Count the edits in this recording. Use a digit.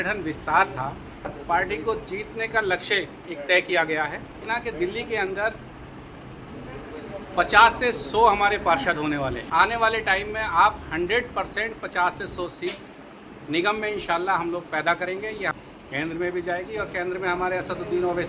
4